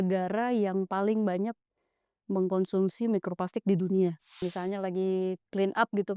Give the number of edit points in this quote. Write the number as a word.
one